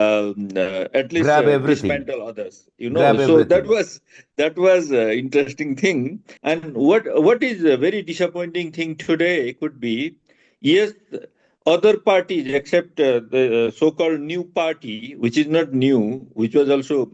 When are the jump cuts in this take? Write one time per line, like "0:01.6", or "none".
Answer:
0:06.3

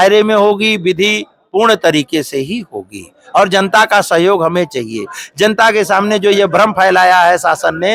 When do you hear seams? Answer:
none

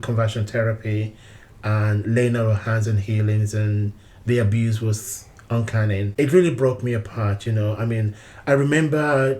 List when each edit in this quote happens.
0:06.1

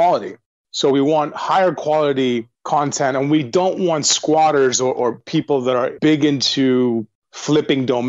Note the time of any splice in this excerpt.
0:02.5
0:03.5
0:05.9

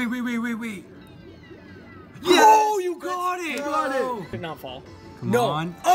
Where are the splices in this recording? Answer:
0:04.3

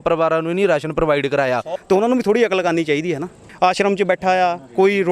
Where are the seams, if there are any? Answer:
0:01.7
0:03.4

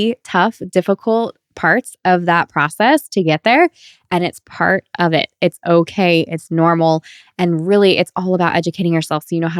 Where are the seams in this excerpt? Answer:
none

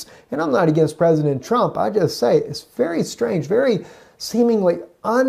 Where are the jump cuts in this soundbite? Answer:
0:03.1

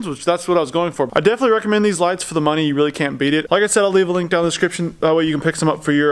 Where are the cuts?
0:01.1

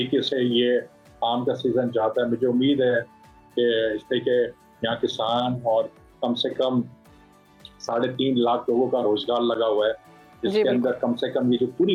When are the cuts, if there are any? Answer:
none

